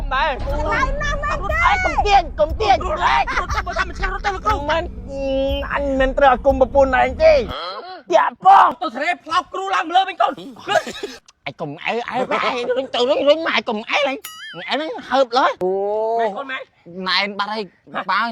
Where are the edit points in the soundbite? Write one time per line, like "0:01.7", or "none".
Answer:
0:08.8
0:11.1
0:15.6